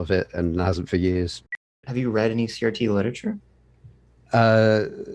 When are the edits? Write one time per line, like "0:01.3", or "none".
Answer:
0:01.8